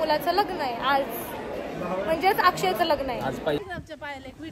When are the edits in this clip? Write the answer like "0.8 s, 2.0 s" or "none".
3.6 s